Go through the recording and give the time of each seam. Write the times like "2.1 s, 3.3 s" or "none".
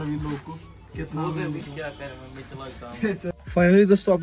3.3 s

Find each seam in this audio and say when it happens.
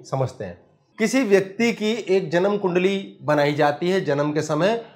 none

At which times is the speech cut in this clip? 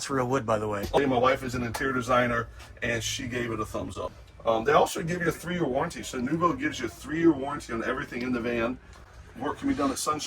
1.0 s, 4.1 s

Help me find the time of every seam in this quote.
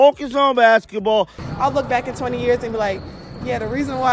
1.4 s

